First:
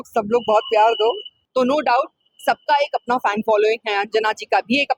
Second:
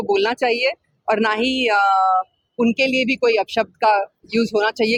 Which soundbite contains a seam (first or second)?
first